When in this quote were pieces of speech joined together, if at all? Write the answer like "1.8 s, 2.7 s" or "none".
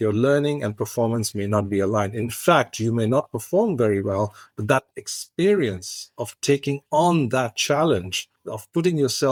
none